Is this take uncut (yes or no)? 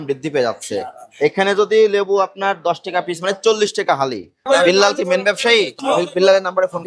no